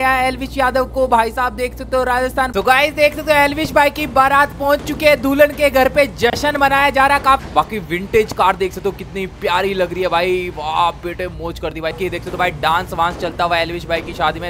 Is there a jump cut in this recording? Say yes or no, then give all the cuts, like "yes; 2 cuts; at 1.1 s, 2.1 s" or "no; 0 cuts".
yes; 3 cuts; at 2.5 s, 7.5 s, 12.0 s